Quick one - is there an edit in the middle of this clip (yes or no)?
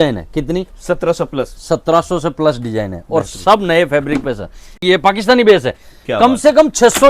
yes